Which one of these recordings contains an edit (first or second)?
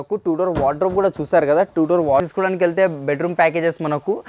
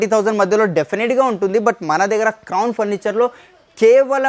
first